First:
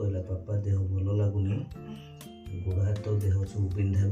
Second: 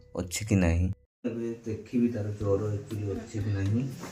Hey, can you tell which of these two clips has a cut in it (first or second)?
second